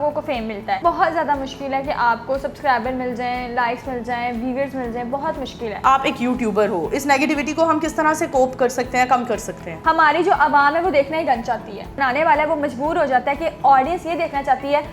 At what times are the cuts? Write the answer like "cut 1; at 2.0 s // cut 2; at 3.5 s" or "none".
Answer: cut 1; at 0.8 s // cut 2; at 5.8 s // cut 3; at 9.6 s // cut 4; at 12.0 s